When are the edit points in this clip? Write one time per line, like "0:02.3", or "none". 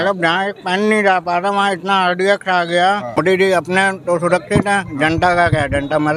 0:03.2